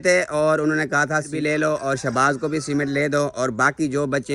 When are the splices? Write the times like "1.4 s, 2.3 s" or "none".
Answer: 1.3 s